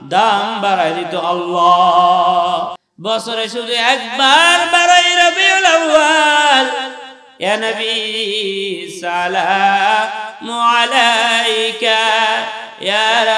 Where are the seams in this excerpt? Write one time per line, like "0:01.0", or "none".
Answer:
0:02.9

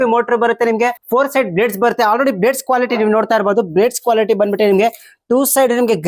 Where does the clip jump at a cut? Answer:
0:01.0

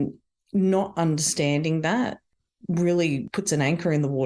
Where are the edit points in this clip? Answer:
0:03.3

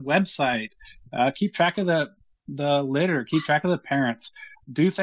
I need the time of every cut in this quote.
none

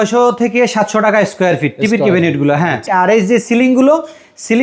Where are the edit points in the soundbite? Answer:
0:02.9

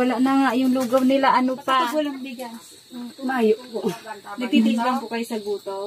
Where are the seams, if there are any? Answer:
0:01.9

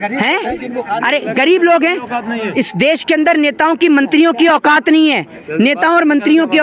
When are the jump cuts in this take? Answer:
none

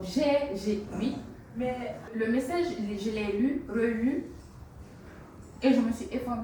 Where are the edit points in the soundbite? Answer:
0:02.1

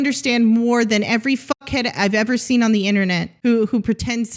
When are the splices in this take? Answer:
0:03.3

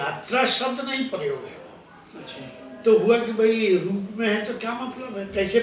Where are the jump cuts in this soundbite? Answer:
none

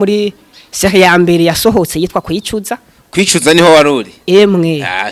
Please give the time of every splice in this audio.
none

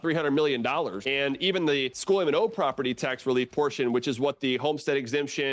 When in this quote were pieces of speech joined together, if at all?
0:01.0
0:01.9

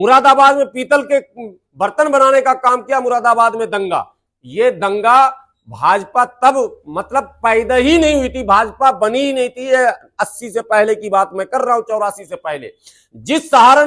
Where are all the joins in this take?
none

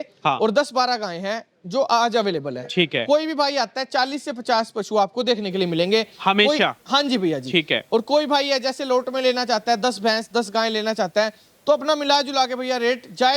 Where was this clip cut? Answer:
none

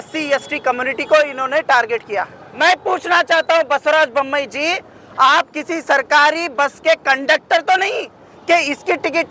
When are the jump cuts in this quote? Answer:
0:02.4

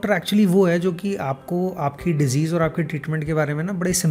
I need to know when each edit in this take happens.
none

